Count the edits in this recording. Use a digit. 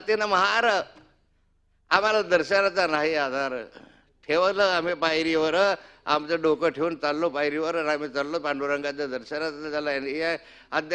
0